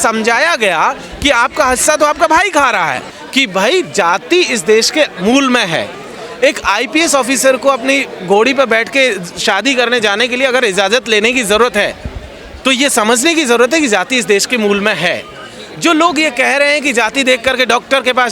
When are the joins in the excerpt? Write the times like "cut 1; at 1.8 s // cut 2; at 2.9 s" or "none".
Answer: cut 1; at 3.1 s